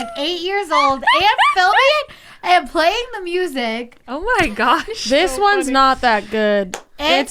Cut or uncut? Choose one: uncut